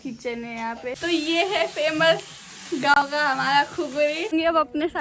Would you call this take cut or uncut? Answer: cut